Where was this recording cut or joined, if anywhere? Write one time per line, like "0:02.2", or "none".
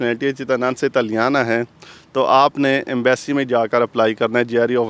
none